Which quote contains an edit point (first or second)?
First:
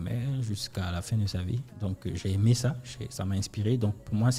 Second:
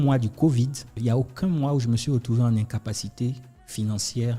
second